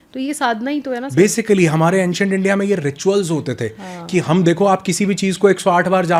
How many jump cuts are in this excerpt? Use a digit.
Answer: 0